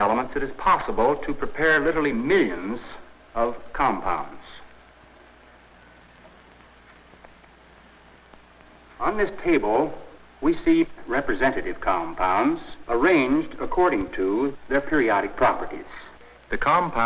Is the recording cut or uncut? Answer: cut